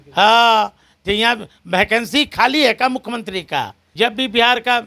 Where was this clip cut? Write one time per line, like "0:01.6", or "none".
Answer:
0:03.8